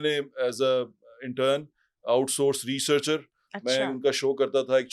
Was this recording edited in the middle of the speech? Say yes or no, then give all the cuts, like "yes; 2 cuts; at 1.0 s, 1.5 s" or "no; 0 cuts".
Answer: no; 0 cuts